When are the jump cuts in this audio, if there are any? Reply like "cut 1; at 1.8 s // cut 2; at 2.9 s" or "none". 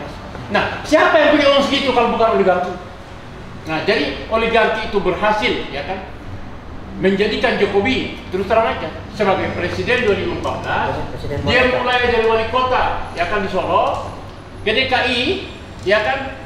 none